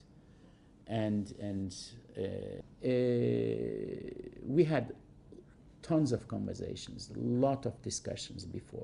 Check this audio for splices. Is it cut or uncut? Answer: uncut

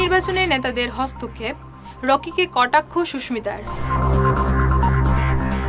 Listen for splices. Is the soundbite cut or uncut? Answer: uncut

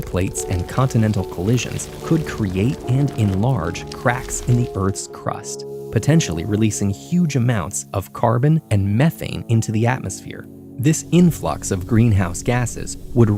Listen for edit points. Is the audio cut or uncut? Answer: uncut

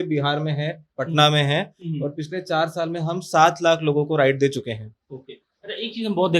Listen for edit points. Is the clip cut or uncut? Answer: uncut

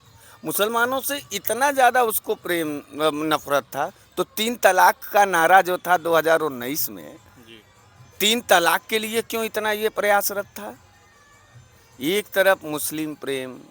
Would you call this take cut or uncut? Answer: uncut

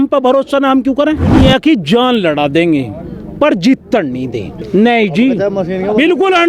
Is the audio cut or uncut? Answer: cut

